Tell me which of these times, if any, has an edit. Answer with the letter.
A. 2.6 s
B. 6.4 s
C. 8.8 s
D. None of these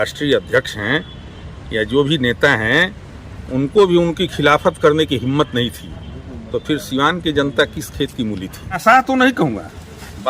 C